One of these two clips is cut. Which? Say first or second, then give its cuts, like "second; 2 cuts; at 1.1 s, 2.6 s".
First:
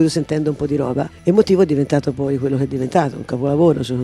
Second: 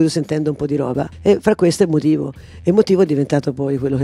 first; 1 cut; at 1.1 s